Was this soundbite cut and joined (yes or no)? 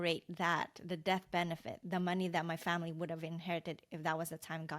no